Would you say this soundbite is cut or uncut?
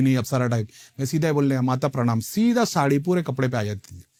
uncut